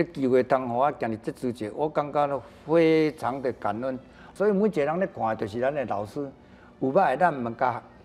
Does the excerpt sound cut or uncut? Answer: uncut